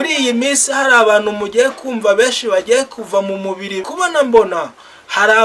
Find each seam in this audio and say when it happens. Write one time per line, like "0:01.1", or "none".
0:03.8